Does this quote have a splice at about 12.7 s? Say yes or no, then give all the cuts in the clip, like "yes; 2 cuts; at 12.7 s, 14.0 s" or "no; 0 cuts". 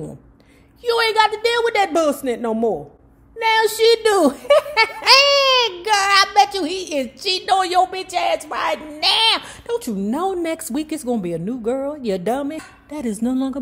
yes; 1 cut; at 12.7 s